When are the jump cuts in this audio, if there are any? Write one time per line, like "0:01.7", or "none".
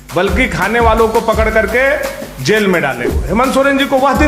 0:03.2